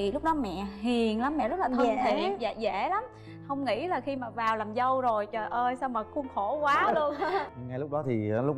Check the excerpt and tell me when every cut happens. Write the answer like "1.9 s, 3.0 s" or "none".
7.5 s